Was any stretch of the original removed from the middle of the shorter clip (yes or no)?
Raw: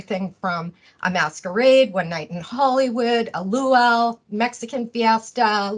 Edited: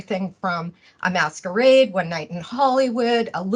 no